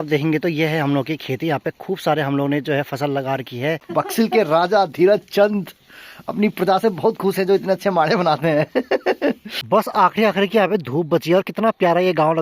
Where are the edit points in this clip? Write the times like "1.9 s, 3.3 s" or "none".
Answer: 3.8 s, 9.5 s